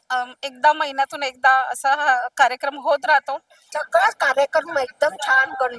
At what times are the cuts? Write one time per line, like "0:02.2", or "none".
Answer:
0:03.6